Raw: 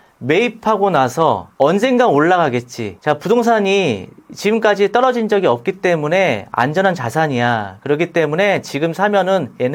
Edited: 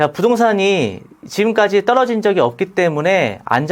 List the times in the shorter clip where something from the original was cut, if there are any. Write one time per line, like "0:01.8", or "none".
none